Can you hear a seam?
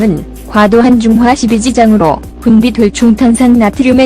yes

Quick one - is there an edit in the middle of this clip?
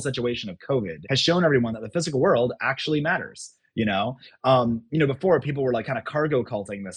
yes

